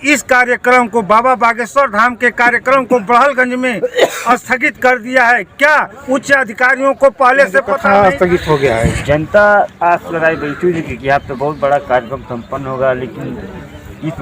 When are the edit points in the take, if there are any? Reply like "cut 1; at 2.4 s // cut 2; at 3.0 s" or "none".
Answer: cut 1; at 7.8 s